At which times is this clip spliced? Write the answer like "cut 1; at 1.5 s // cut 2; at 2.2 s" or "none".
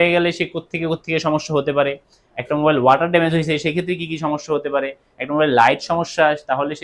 none